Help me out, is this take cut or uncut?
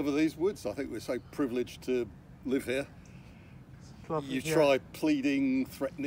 uncut